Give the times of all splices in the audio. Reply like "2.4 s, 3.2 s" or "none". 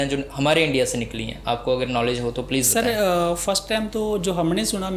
none